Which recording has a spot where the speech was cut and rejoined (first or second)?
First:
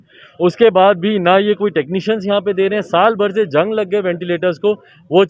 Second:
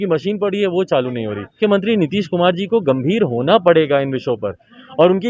second